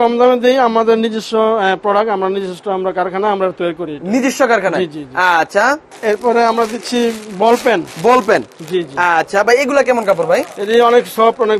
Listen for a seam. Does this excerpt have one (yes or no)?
no